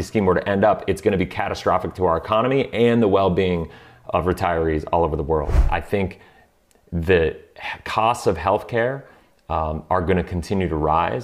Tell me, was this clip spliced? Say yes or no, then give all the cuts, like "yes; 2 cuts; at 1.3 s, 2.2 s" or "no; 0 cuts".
yes; 1 cut; at 5.6 s